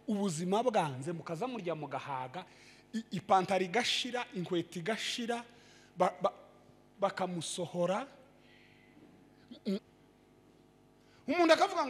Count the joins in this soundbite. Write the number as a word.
one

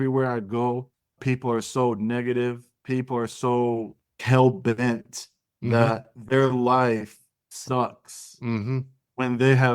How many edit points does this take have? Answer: two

